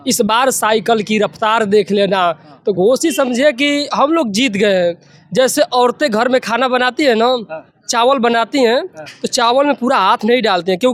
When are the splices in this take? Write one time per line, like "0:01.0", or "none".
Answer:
none